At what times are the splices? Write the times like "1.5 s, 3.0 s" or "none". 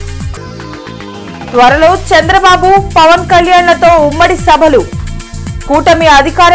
1.3 s